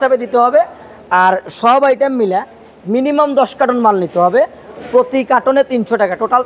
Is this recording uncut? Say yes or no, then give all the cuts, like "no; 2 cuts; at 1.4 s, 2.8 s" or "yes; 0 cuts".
yes; 0 cuts